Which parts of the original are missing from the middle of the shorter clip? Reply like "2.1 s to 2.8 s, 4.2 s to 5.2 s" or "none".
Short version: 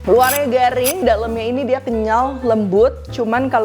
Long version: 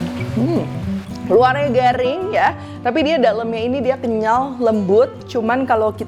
2.2 s to 3.2 s